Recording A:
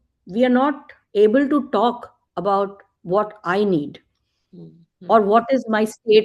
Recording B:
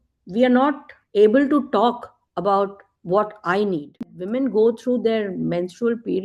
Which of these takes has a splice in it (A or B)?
B